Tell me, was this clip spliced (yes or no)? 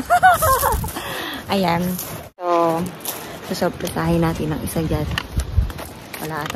yes